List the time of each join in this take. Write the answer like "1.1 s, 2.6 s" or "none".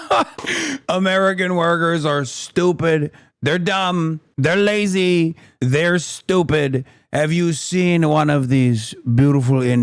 none